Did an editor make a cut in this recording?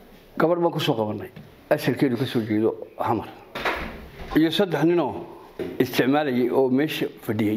yes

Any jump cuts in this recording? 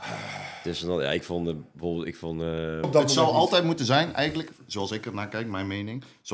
yes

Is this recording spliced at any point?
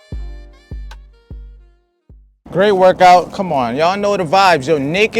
no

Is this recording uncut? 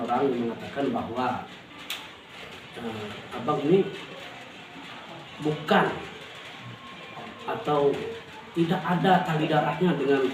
yes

